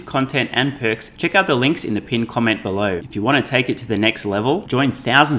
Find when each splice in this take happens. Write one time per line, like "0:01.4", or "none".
0:01.1
0:03.0